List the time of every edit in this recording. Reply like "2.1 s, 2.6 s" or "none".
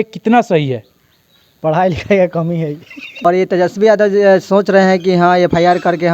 3.3 s